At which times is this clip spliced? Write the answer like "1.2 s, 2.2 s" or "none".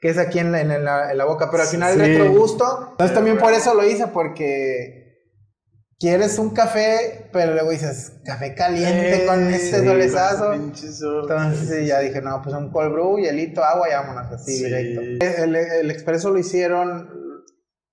2.8 s, 15.2 s